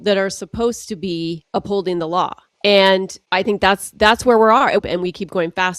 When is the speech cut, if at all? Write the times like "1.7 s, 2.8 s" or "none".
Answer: 1.4 s, 2.4 s, 3.2 s, 4.8 s